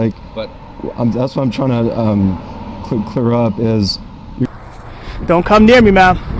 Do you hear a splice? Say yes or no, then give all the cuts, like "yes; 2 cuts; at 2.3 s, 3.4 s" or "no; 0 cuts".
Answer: yes; 1 cut; at 4.4 s